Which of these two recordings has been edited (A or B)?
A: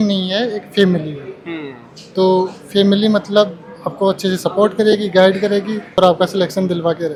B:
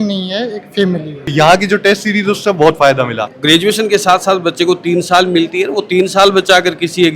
B